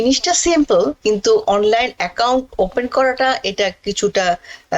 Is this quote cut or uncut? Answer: uncut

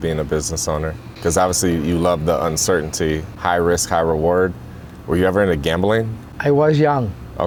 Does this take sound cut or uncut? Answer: uncut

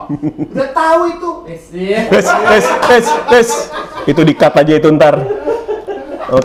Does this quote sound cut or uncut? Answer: uncut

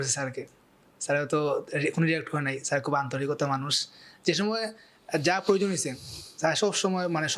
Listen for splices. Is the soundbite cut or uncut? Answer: uncut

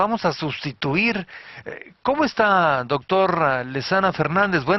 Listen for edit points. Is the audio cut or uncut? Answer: uncut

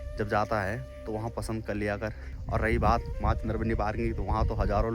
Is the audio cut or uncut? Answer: cut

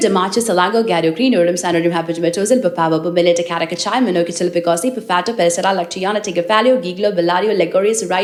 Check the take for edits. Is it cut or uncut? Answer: uncut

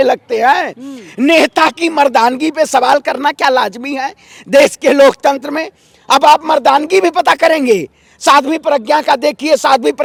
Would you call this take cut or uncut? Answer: uncut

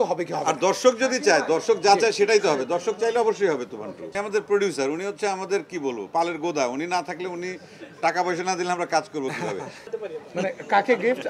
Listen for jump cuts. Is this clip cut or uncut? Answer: cut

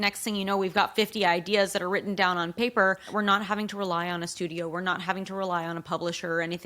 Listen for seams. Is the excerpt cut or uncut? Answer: cut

